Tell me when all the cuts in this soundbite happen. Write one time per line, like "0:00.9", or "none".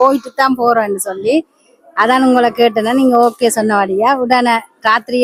none